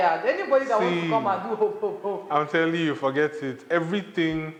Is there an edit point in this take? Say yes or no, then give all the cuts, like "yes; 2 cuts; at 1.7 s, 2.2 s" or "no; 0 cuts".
no; 0 cuts